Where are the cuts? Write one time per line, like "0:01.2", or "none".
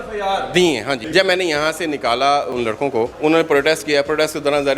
0:01.0
0:02.9